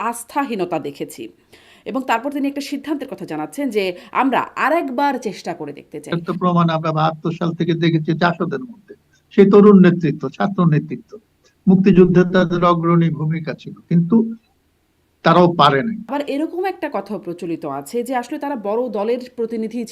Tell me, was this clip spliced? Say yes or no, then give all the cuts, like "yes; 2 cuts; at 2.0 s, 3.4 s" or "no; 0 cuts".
yes; 2 cuts; at 6.1 s, 16.1 s